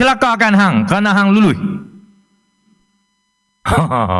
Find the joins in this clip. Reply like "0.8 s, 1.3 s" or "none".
none